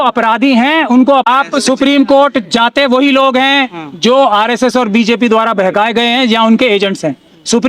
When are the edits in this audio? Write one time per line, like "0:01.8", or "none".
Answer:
0:01.2